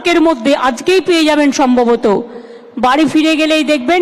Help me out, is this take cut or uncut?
uncut